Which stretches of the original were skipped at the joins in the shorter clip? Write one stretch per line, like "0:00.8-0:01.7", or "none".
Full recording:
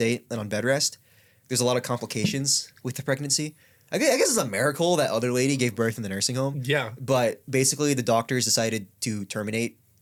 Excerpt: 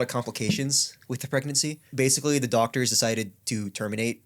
0:03.6-0:07.4